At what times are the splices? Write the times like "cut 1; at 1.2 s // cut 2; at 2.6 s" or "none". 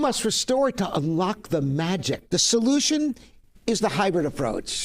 cut 1; at 2.2 s